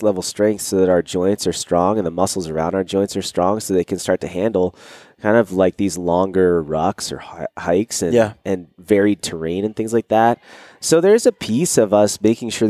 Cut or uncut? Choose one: uncut